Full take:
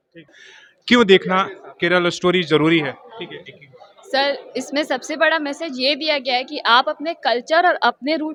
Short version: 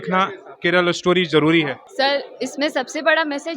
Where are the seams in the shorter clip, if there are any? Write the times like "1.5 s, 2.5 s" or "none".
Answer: 1.8 s